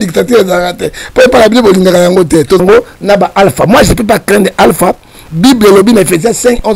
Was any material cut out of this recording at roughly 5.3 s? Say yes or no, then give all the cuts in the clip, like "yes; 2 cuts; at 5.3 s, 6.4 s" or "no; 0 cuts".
no; 1 cut; at 2.6 s